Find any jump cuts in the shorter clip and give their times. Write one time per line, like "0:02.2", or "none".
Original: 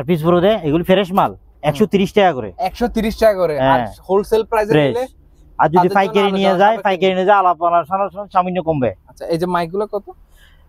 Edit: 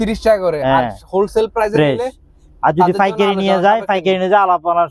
none